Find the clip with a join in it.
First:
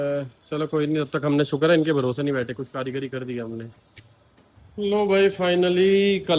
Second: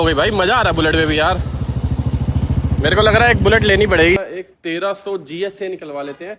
second; 1 cut; at 4.2 s

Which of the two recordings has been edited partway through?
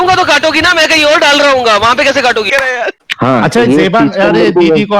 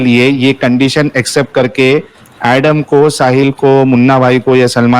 first; 1 cut; at 2.5 s

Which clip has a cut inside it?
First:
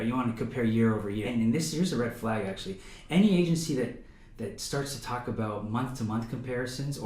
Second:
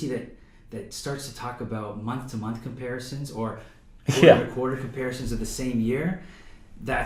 first; 1 cut; at 1.3 s

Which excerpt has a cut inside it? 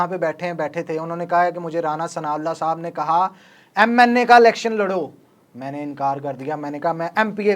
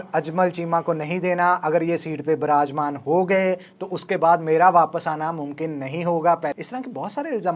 second; 1 cut; at 6.5 s

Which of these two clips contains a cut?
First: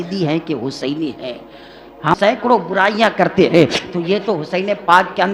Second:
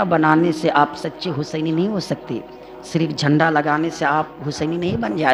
first; 1 cut; at 2.3 s

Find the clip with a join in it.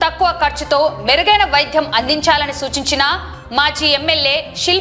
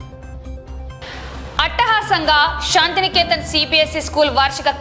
second; 1 cut; at 1.0 s

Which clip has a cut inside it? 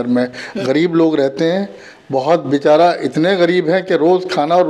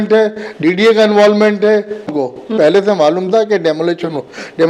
second; 1 cut; at 2.2 s

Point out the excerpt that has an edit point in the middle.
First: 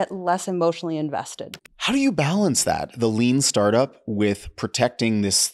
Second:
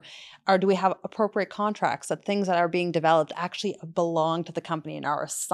first; 1 cut; at 1.4 s

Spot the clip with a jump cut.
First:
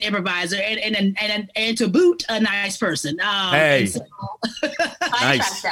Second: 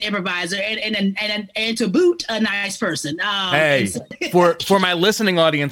second; 1 cut; at 4.2 s

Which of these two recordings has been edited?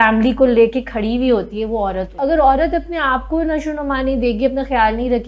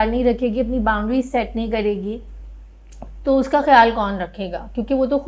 first; 1 cut; at 2.2 s

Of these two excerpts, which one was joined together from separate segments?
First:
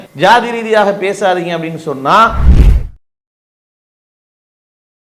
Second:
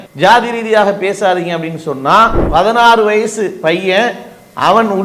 second; 1 cut; at 2.4 s

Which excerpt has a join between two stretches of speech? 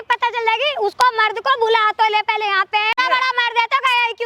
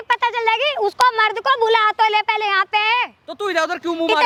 first; 1 cut; at 3.0 s

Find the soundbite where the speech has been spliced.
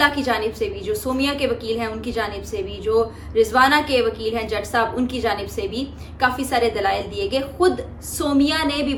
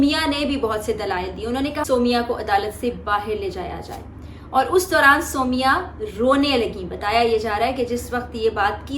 second; 1 cut; at 1.8 s

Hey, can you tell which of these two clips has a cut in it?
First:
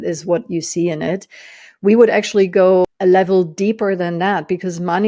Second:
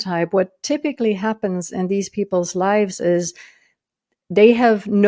first; 1 cut; at 2.9 s

